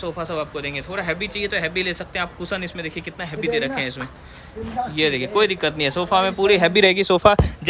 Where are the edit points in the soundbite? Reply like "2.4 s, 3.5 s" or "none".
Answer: none